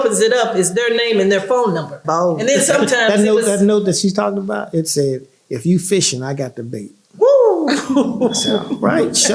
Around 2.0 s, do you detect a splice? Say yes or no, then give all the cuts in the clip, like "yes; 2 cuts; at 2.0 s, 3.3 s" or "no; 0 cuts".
yes; 1 cut; at 2.0 s